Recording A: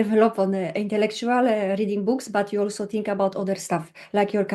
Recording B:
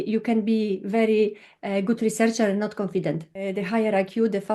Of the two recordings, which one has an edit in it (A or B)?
B